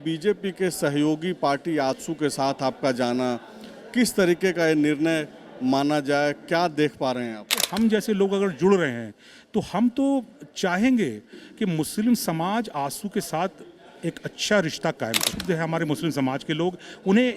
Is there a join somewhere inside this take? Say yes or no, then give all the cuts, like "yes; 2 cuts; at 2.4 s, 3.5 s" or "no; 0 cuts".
yes; 2 cuts; at 7.6 s, 15.3 s